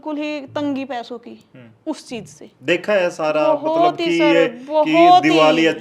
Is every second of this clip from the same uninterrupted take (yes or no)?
yes